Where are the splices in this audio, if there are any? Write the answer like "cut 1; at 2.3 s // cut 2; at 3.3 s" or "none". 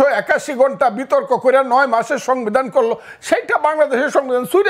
none